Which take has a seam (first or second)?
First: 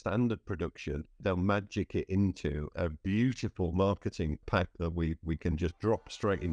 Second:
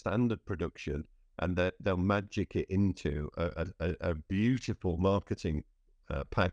first